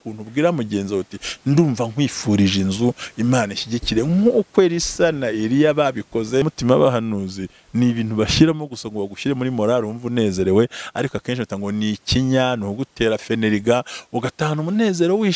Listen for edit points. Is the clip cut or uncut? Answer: cut